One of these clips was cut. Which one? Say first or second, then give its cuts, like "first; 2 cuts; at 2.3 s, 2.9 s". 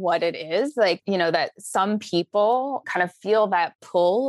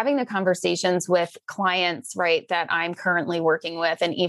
first; 2 cuts; at 1.0 s, 2.8 s